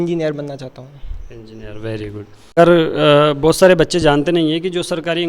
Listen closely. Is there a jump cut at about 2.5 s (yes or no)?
yes